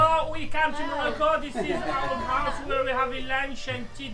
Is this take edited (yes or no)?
no